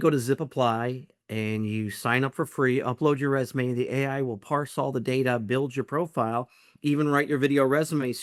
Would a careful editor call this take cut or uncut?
uncut